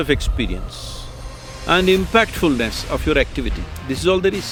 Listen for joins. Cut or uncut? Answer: uncut